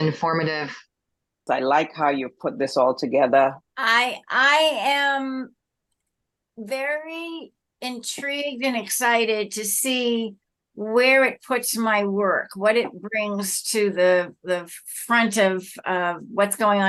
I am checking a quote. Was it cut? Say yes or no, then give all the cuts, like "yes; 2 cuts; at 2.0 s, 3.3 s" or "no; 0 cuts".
no; 0 cuts